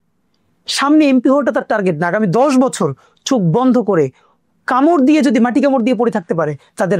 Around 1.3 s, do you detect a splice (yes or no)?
no